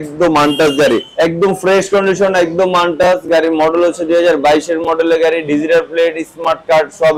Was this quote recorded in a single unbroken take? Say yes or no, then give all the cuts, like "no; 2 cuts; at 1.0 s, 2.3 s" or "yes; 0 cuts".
no; 1 cut; at 1.1 s